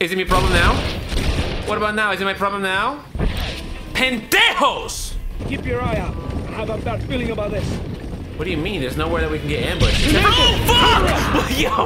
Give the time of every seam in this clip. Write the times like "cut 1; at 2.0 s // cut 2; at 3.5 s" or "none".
cut 1; at 5.4 s